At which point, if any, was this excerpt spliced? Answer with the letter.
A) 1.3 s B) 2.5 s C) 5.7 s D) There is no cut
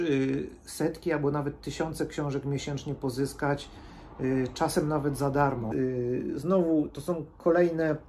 C